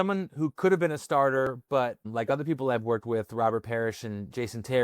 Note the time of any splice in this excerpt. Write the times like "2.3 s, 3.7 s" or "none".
1.6 s